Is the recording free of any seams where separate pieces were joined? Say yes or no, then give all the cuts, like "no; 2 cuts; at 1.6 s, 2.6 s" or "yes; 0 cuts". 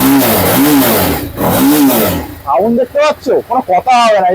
yes; 0 cuts